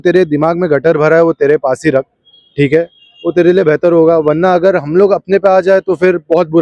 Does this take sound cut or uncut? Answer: uncut